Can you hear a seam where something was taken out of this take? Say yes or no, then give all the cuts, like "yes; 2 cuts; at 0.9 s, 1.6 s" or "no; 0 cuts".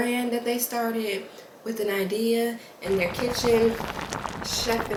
no; 0 cuts